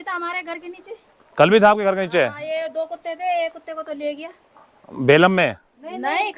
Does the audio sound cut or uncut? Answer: uncut